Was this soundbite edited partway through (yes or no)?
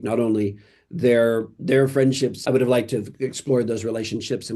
yes